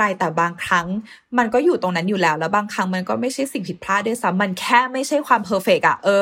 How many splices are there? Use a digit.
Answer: 0